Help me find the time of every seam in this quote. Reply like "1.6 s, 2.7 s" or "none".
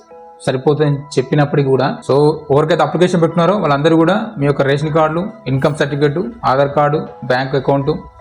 2.0 s

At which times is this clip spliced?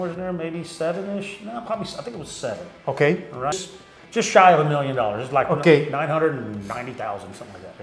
3.6 s

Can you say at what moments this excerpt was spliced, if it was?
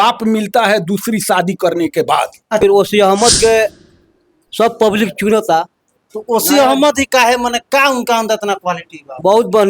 2.6 s

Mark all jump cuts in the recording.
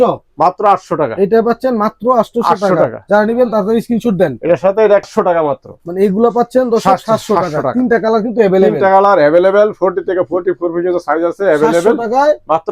5.1 s

